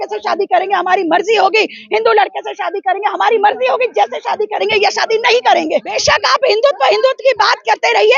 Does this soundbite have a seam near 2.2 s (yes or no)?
no